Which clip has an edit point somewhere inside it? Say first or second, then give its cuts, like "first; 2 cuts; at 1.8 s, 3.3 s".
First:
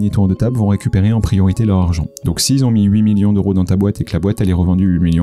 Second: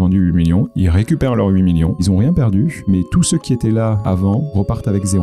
second; 3 cuts; at 2.0 s, 2.8 s, 4.2 s